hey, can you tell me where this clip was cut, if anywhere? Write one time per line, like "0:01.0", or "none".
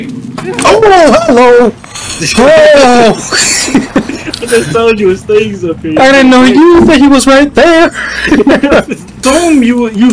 0:09.2